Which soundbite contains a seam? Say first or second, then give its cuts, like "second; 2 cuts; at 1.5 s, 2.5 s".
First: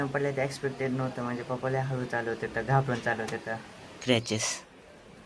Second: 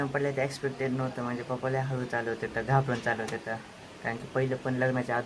first; 1 cut; at 4.0 s